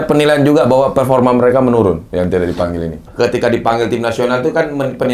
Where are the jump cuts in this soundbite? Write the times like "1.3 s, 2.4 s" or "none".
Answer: 3.1 s